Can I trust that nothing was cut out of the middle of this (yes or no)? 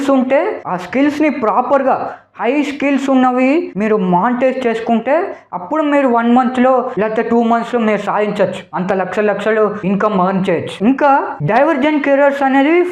yes